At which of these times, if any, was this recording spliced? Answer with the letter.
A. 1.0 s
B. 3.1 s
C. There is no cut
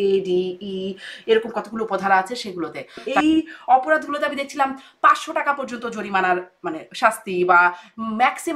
B